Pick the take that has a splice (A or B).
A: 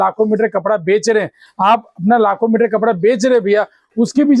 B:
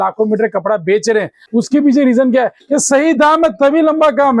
B